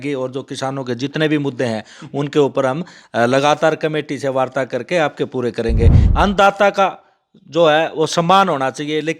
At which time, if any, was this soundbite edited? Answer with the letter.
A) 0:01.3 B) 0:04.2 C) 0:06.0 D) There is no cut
C